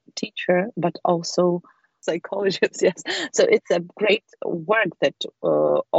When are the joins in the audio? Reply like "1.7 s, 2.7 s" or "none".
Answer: none